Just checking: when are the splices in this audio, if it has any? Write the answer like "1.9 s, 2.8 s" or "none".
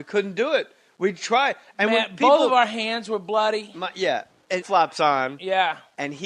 none